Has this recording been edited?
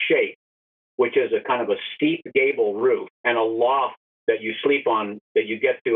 yes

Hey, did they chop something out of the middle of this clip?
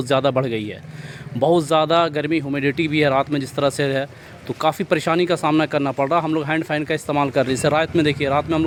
no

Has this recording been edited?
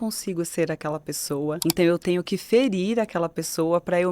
yes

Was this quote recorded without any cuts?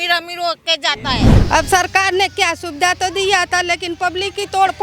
no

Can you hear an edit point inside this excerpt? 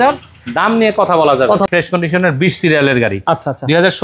yes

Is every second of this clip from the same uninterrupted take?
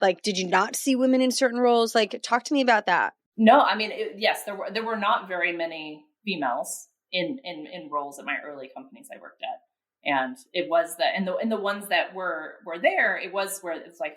no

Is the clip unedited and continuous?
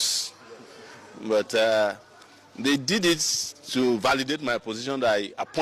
yes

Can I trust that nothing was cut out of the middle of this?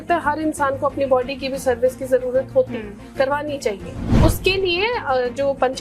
no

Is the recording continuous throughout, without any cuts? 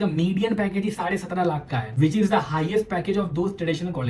yes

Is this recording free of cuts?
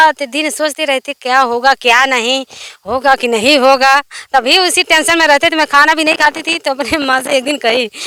yes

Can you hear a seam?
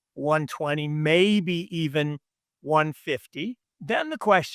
yes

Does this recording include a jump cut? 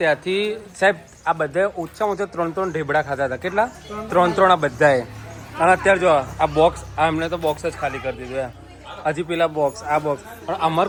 no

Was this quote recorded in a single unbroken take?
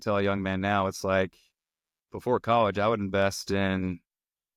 yes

